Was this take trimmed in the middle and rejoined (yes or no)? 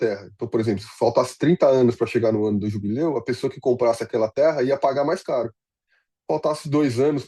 no